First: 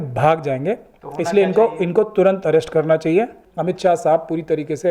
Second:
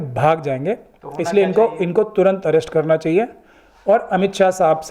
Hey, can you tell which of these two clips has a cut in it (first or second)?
first